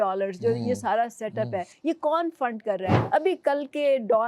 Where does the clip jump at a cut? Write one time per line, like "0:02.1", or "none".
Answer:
0:01.7
0:03.0